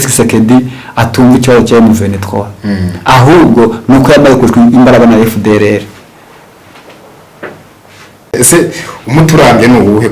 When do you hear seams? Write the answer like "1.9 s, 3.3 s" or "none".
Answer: none